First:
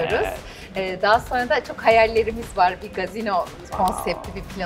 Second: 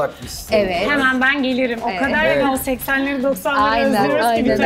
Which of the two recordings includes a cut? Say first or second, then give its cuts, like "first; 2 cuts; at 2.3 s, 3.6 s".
first; 1 cut; at 3.7 s